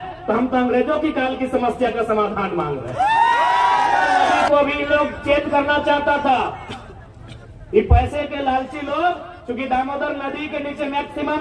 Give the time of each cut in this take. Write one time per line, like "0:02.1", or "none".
0:04.5

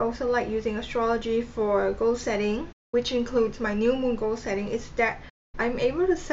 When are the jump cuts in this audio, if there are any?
none

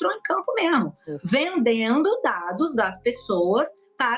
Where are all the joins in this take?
none

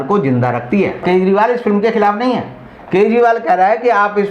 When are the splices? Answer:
0:01.0

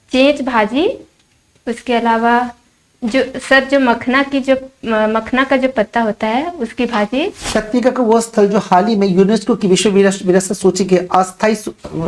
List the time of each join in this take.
0:07.4

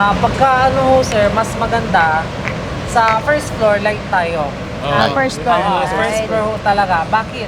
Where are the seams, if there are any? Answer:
none

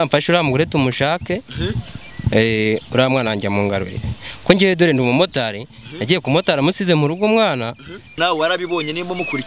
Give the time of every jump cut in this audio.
0:08.1

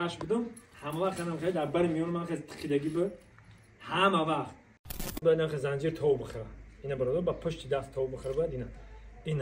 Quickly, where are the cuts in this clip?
0:05.2

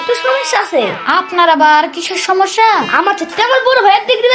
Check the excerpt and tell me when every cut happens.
0:02.9

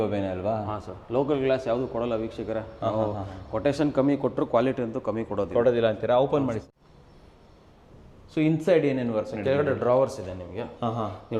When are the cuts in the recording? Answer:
none

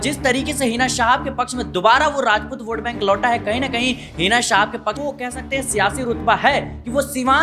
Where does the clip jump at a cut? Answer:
0:05.0

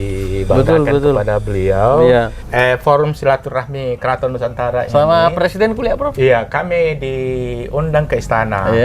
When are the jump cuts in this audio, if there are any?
0:02.4

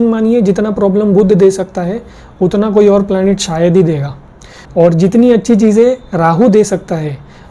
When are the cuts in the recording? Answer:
none

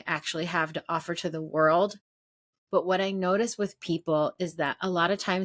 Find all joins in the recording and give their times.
none

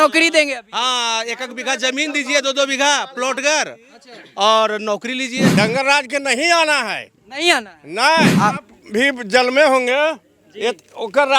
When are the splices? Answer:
0:05.5
0:08.3

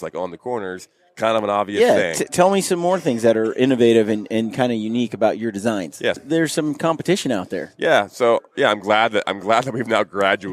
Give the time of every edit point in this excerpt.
0:06.2

